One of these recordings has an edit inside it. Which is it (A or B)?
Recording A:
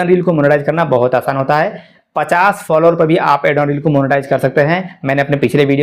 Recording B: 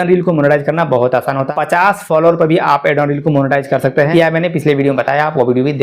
B